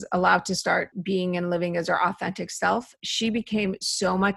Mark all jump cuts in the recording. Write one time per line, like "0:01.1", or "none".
0:00.9